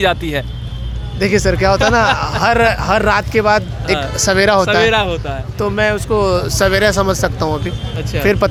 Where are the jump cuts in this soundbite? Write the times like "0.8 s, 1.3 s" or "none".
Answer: none